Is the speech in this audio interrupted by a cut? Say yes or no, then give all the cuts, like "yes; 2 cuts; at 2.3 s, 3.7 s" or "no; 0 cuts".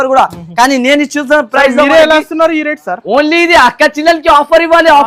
no; 0 cuts